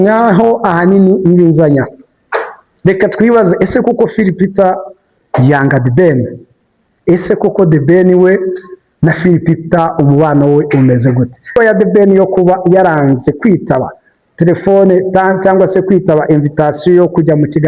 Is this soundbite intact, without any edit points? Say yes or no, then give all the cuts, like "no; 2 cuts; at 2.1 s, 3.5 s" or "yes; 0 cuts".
no; 1 cut; at 11.6 s